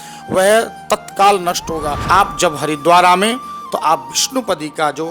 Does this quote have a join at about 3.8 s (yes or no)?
no